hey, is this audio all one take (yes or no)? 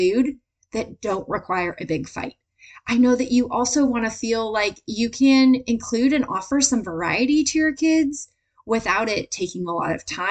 yes